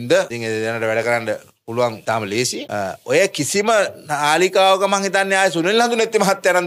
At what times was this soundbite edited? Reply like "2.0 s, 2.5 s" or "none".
2.6 s